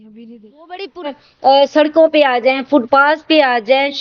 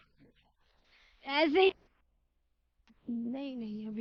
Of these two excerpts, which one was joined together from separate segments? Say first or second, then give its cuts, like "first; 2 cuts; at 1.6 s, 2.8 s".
first; 1 cut; at 1.2 s